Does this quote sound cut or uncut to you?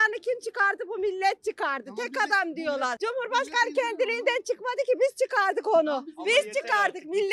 uncut